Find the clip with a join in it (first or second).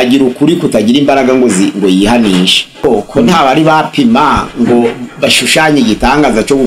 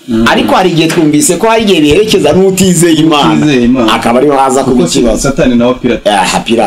first